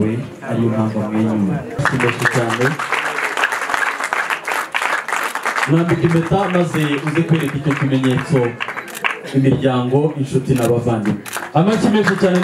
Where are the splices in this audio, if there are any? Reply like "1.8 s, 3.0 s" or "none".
1.7 s